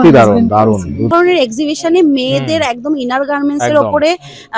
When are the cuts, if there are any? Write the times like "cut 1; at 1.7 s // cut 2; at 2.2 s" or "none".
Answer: cut 1; at 1.1 s